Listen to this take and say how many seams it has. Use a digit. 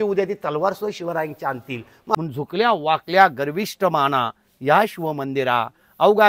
1